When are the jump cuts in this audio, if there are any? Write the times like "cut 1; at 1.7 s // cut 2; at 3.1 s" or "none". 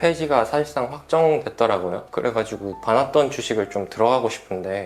cut 1; at 2.0 s